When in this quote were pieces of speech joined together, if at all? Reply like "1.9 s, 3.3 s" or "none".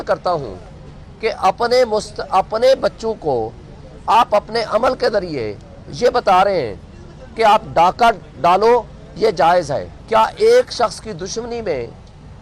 9.9 s